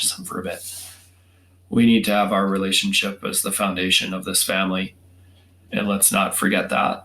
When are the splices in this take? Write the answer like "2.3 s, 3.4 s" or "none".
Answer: 5.6 s